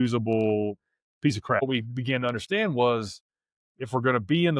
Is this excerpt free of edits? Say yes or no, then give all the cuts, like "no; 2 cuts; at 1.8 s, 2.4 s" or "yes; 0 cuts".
no; 1 cut; at 1.6 s